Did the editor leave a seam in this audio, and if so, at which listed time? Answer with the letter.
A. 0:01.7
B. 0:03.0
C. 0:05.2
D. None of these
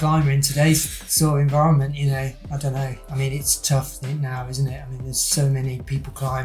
D